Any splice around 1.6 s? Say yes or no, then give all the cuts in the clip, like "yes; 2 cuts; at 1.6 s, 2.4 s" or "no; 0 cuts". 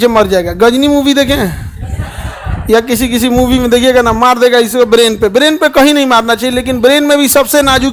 no; 0 cuts